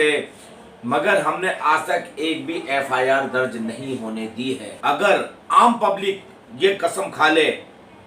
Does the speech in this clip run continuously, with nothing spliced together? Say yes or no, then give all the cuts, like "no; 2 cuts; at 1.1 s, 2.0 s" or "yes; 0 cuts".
no; 1 cut; at 4.7 s